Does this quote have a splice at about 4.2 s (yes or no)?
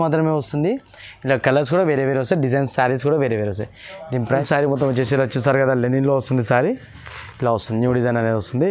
yes